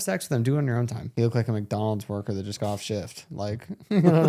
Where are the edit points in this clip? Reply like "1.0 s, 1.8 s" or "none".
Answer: 1.0 s

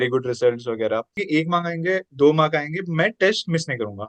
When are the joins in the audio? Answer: 1.1 s

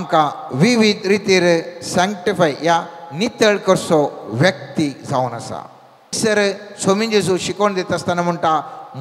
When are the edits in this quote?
6.2 s

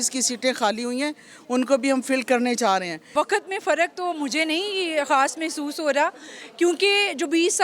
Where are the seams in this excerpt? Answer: 3.0 s

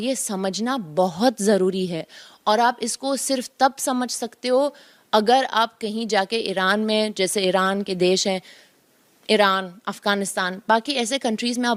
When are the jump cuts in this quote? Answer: none

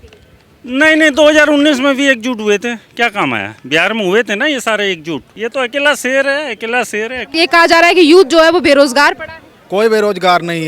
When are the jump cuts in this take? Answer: 5.3 s, 7.4 s

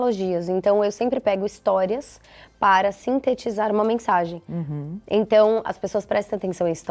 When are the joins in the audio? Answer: none

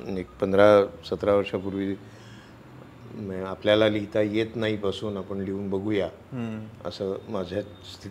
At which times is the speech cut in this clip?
none

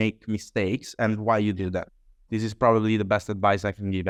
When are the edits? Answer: none

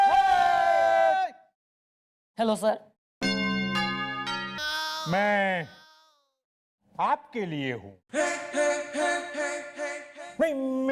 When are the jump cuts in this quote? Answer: 4.5 s

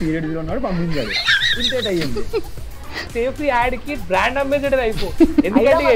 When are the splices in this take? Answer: 3.1 s

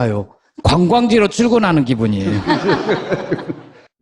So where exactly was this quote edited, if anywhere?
3.0 s

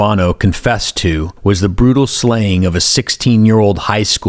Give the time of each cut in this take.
1.3 s

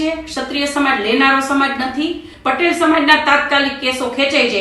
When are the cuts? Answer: 2.3 s

